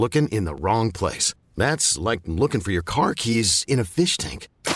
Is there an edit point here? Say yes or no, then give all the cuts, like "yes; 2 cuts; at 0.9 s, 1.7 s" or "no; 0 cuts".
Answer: no; 0 cuts